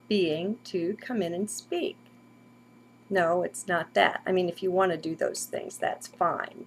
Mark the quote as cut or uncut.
cut